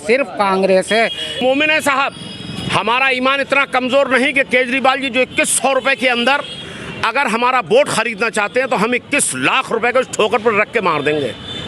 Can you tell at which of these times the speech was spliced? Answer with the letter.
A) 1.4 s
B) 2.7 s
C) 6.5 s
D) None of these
A